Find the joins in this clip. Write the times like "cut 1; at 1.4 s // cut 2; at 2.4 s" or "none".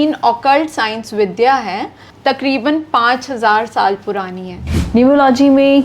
cut 1; at 2.1 s // cut 2; at 4.6 s